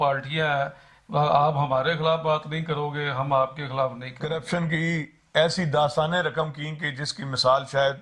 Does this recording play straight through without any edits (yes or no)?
no